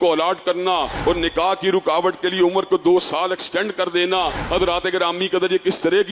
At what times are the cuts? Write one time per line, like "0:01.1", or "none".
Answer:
0:00.9
0:04.4